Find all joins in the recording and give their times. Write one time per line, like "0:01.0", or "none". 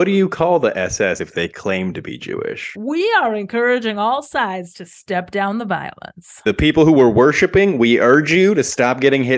0:02.8
0:06.4

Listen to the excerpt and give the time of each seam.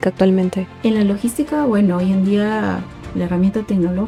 none

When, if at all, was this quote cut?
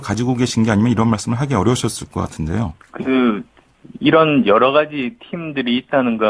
0:02.8

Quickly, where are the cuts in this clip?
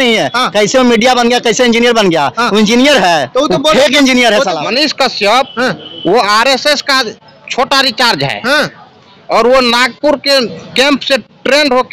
0:04.6

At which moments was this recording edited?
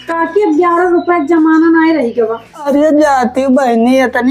0:02.5

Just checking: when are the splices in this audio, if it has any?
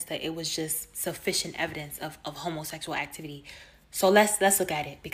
0:03.0

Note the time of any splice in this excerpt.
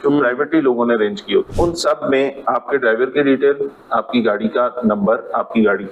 0:01.5

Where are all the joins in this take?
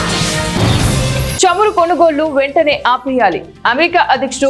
0:01.3

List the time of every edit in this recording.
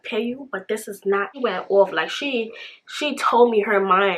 0:01.3

